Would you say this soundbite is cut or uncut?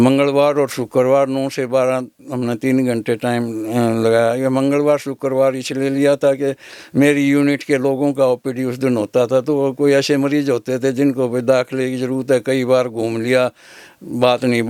uncut